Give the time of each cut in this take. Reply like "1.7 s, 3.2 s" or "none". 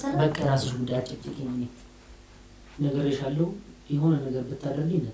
none